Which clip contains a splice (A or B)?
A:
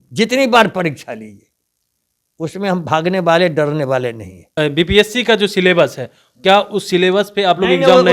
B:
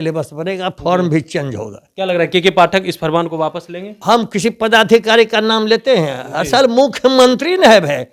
A